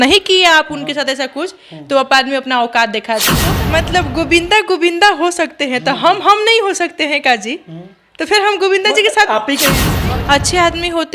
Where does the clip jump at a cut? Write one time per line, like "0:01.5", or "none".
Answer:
0:03.4
0:09.9